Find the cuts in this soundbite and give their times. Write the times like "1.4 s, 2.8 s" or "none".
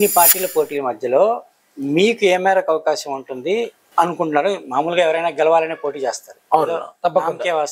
3.8 s